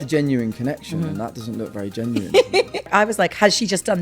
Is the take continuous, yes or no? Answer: no